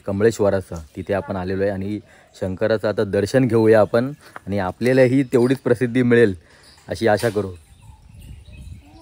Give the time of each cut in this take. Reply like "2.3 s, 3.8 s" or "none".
7.8 s